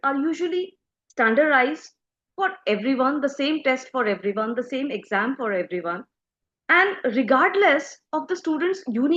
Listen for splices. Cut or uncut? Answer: uncut